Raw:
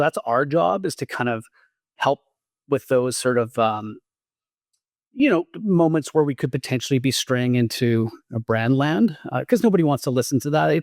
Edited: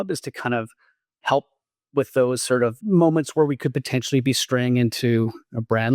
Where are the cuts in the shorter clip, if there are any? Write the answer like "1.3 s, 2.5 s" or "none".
2.8 s